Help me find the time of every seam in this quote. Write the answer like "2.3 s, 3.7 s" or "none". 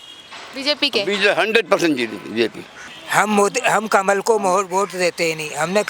2.9 s